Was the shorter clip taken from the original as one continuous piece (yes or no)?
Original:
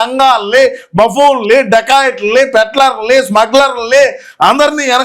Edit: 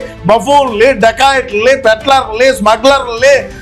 yes